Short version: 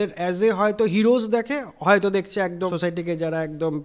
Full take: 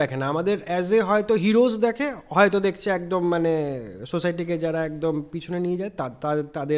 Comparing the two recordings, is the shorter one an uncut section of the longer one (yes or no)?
no